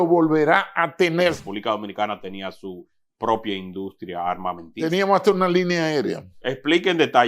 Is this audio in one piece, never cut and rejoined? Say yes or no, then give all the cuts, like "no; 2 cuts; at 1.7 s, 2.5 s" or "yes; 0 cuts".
no; 1 cut; at 1.4 s